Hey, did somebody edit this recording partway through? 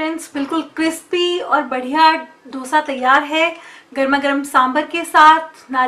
no; 0 cuts

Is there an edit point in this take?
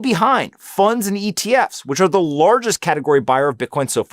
no; 0 cuts

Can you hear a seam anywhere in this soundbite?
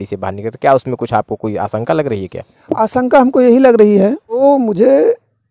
yes; 1 cut; at 4.4 s

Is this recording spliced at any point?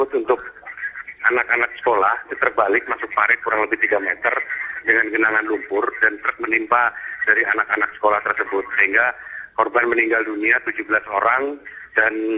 no; 0 cuts

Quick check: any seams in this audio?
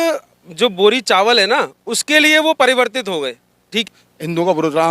yes; 1 cut; at 3.9 s

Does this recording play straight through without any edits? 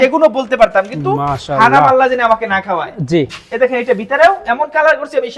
yes; 0 cuts

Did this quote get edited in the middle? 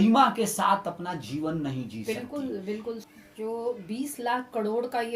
yes; 1 cut; at 3.0 s

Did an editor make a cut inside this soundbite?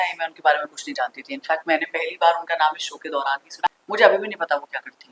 yes; 1 cut; at 3.7 s

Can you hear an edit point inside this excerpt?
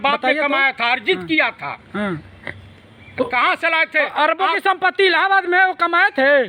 no; 0 cuts

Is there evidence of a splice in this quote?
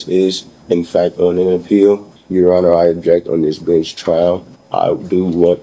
yes; 2 cuts; at 2.1 s, 4.5 s

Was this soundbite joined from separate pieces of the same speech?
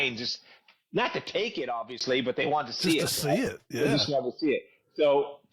no; 0 cuts

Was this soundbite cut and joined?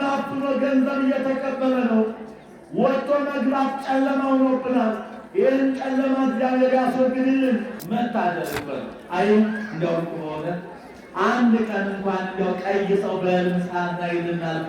yes; 1 cut; at 7.8 s

